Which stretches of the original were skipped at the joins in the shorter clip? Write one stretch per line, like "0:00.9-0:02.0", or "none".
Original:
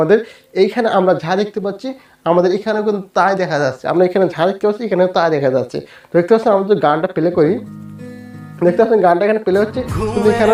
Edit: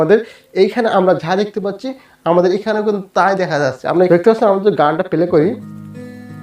0:04.1-0:06.1